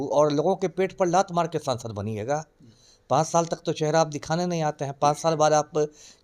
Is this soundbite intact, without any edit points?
yes; 0 cuts

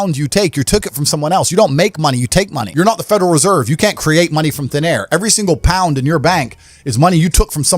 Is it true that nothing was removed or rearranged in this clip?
no; 1 cut; at 2.6 s

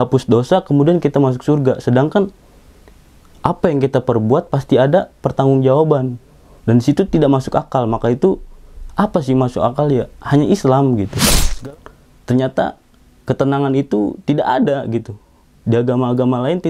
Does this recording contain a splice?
yes; 1 cut; at 11.5 s

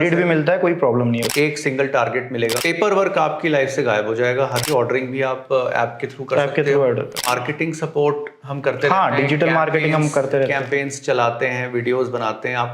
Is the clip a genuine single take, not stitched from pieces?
no; 4 cuts; at 1.3 s, 2.6 s, 4.6 s, 7.3 s

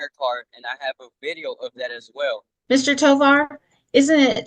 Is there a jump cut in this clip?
yes; 1 cut; at 2.5 s

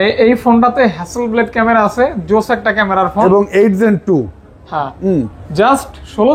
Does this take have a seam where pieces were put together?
no; 0 cuts

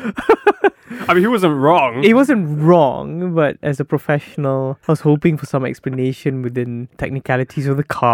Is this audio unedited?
no; 1 cut; at 4.8 s

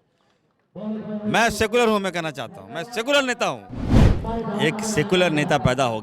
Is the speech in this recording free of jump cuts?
no; 1 cut; at 4.1 s

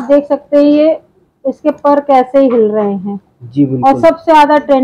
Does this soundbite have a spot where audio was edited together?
no; 0 cuts

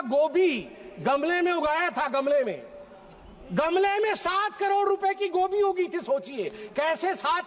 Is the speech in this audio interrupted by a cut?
no; 0 cuts

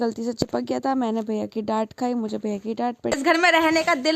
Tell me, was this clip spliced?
yes; 1 cut; at 3.2 s

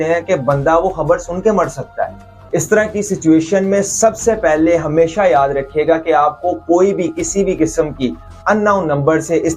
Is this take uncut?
no; 1 cut; at 2.3 s

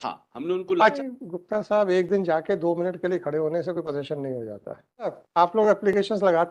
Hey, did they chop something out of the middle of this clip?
yes; 2 cuts; at 0.9 s, 5.2 s

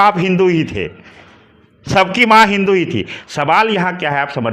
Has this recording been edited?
no; 0 cuts

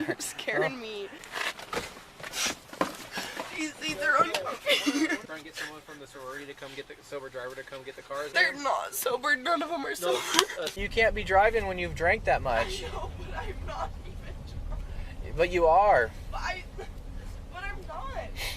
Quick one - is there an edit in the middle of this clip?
yes; 4 cuts; at 1.2 s, 5.2 s, 8.3 s, 10.8 s

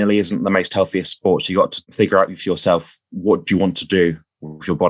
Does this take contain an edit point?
yes; 1 cut; at 1.8 s

